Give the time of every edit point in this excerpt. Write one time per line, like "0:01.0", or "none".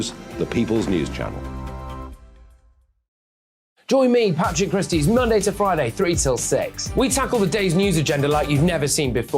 0:03.7